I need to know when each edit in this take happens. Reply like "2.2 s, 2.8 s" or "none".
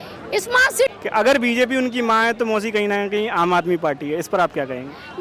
0.9 s